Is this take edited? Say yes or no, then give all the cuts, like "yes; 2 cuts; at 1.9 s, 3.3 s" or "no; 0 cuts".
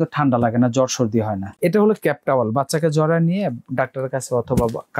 yes; 1 cut; at 1.4 s